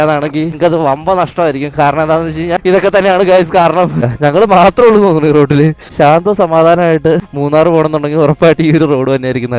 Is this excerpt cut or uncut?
cut